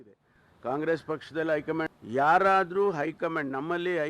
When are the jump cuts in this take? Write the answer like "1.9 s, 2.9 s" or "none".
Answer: 2.0 s